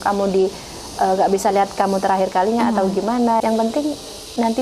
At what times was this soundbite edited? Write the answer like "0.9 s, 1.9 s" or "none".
3.4 s